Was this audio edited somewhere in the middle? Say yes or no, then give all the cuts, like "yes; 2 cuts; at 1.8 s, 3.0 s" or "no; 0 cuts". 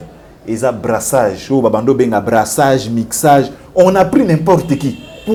no; 0 cuts